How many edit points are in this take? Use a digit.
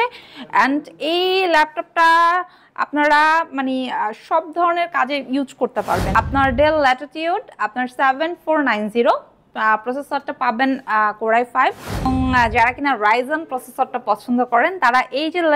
2